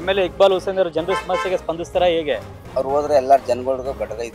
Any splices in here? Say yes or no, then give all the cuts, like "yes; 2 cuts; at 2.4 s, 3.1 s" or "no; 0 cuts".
no; 0 cuts